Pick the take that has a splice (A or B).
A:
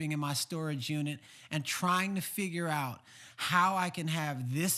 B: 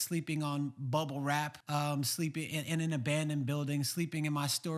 B